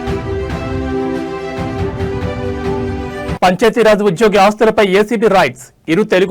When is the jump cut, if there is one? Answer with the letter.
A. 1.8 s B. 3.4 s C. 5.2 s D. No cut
B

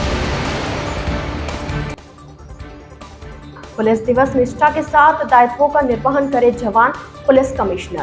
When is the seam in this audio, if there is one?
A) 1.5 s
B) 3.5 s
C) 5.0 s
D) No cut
D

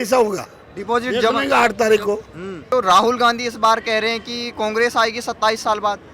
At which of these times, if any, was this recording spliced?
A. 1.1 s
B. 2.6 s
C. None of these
B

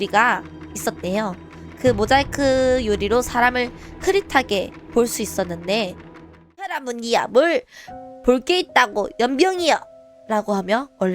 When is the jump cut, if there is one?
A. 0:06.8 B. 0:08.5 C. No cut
A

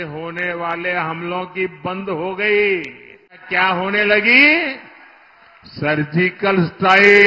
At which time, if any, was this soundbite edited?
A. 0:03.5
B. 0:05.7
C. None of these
A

